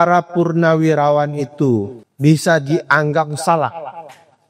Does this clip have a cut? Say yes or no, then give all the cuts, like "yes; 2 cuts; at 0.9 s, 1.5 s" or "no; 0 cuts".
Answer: yes; 1 cut; at 2.0 s